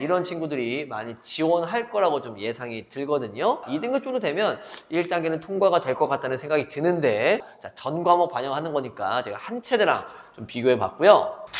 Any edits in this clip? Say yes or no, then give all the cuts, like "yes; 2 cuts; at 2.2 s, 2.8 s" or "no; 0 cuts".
yes; 2 cuts; at 3.6 s, 7.4 s